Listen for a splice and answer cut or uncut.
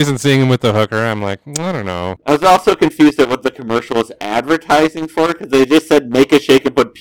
cut